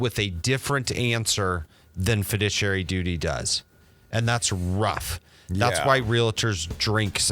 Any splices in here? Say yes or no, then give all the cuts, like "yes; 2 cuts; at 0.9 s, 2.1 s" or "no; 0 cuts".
no; 0 cuts